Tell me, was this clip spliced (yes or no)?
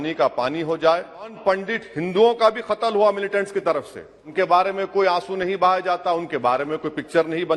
yes